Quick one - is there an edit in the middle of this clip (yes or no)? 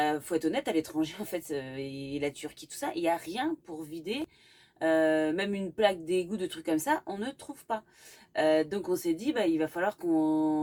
no